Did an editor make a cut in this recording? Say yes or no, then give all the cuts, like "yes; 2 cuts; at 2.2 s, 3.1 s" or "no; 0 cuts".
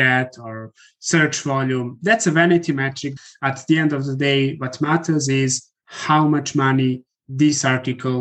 yes; 1 cut; at 3.3 s